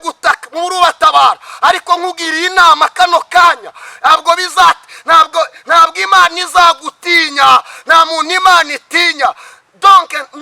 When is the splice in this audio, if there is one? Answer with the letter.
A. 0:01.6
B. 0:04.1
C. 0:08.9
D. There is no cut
B